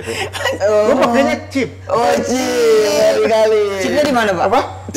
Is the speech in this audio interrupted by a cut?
no; 0 cuts

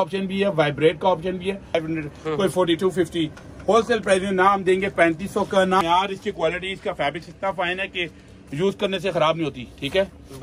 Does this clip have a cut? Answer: yes; 2 cuts; at 1.8 s, 5.8 s

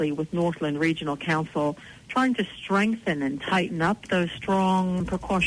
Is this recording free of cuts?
yes; 0 cuts

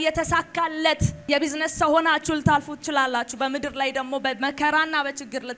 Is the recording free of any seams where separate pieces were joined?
no; 1 cut; at 1.2 s

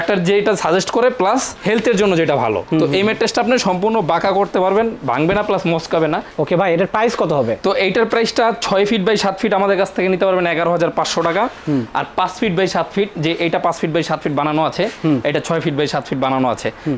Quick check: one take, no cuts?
yes; 0 cuts

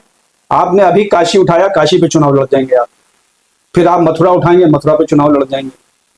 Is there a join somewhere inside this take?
no; 0 cuts

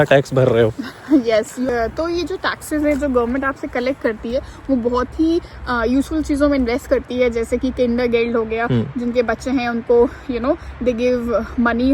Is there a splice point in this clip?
no; 0 cuts

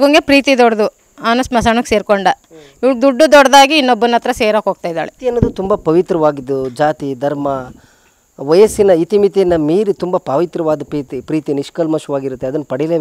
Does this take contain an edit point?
no; 0 cuts

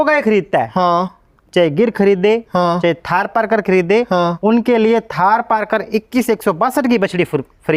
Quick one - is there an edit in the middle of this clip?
no; 0 cuts

